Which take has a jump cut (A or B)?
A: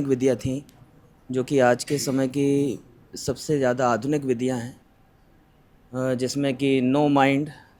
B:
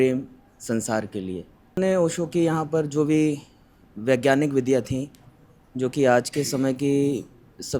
B